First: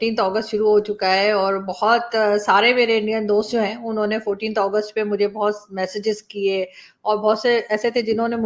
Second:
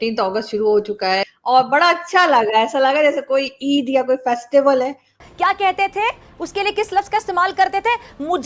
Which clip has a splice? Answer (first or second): second